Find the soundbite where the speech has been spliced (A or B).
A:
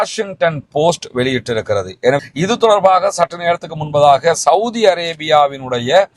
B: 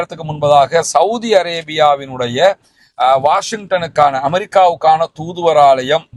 A